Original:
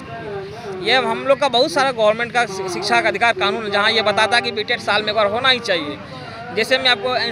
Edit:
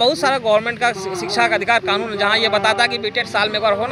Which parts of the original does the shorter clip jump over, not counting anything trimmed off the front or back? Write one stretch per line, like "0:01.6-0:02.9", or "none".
none